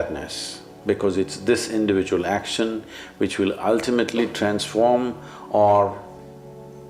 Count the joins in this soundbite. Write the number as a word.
zero